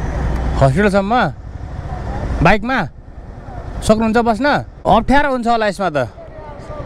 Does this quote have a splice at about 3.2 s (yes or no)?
no